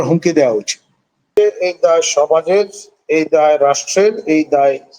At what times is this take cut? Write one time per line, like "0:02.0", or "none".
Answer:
0:01.3